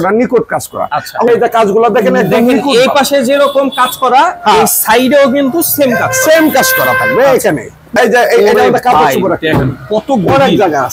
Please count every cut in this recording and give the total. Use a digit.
2